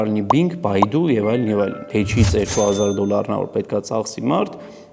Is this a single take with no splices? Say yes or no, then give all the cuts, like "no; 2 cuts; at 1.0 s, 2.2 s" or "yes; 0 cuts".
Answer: no; 1 cut; at 1.8 s